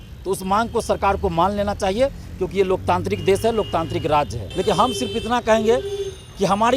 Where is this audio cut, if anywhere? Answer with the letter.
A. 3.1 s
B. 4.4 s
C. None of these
B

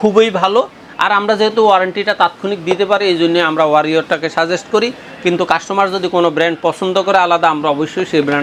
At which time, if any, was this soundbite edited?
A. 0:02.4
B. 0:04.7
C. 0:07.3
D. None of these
D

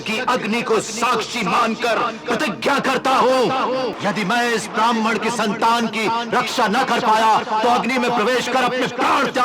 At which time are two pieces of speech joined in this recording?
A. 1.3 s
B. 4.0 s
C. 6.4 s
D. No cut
B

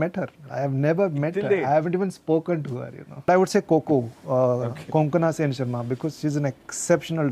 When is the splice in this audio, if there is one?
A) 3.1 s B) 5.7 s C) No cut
A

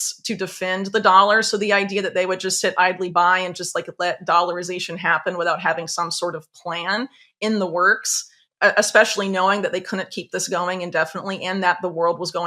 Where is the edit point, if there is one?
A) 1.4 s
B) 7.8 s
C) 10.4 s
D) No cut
A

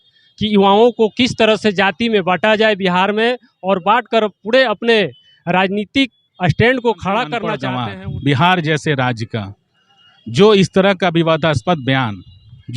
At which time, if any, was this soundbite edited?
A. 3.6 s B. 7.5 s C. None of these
B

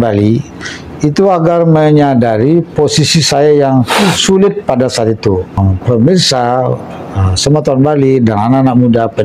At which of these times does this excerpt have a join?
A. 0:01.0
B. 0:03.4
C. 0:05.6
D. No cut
C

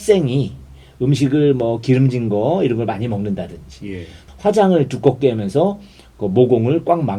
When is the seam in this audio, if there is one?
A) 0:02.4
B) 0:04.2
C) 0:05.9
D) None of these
B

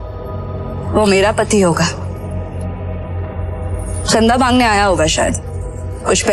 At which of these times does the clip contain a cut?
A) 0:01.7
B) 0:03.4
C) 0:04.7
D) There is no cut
D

